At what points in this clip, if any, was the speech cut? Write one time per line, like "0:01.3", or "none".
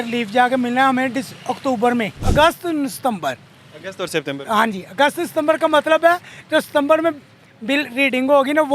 0:02.2